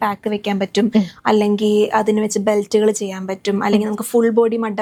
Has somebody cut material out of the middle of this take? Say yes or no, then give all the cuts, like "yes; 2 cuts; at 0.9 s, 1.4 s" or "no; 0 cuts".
no; 0 cuts